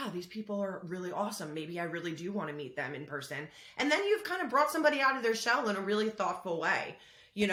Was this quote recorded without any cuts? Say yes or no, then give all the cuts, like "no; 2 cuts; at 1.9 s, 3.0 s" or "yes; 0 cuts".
yes; 0 cuts